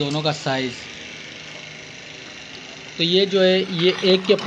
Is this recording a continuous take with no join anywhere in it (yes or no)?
yes